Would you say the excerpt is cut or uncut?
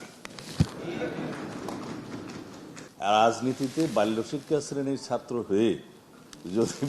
cut